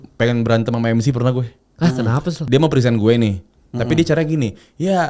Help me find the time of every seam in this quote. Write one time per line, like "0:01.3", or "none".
0:02.4